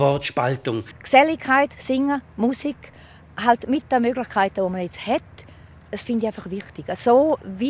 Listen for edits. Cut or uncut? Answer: cut